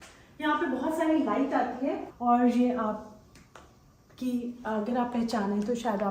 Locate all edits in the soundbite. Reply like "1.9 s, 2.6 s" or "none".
2.1 s